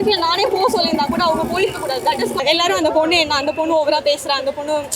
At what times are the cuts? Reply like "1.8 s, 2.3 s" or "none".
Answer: 2.4 s

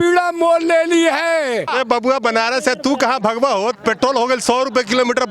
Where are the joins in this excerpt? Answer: 1.7 s

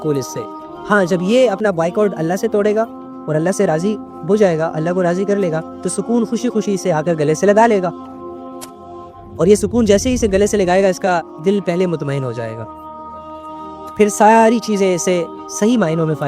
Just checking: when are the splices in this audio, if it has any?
12.6 s, 13.9 s

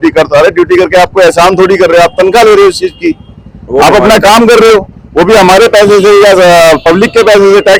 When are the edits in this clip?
none

